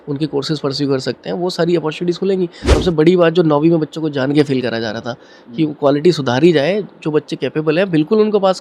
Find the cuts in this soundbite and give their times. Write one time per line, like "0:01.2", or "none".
0:02.6